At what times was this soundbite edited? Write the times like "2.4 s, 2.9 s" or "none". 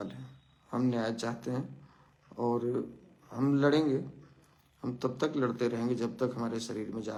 none